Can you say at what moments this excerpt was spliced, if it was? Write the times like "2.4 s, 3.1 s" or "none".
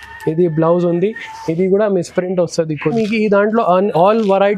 2.9 s